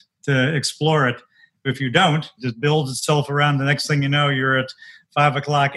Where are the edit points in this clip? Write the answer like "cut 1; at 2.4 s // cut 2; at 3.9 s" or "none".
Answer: cut 1; at 1.7 s // cut 2; at 2.4 s